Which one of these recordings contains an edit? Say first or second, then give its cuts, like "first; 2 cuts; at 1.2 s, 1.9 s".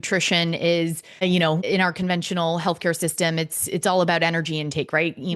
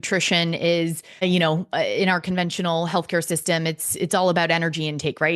first; 1 cut; at 1.6 s